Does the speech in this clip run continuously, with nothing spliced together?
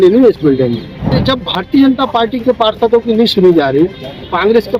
no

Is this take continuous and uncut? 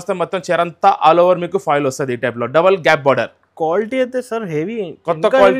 yes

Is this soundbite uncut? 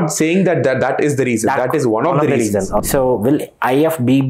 no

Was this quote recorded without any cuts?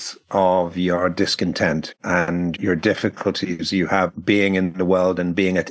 no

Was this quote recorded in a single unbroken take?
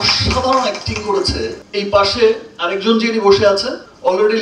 yes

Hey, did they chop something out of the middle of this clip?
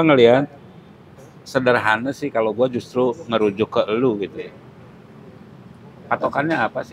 no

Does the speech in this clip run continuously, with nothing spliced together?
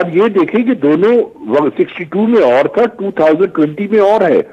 yes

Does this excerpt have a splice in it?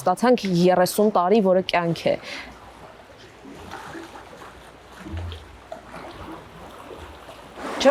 no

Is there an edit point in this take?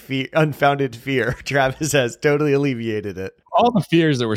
yes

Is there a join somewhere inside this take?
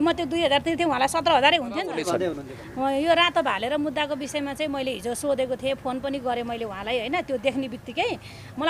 yes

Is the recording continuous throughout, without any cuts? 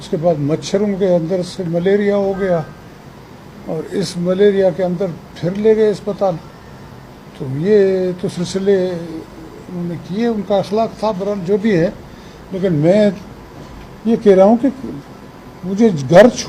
yes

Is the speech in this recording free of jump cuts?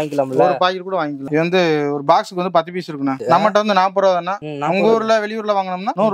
no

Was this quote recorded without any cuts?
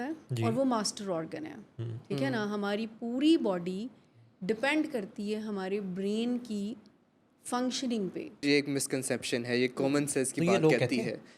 no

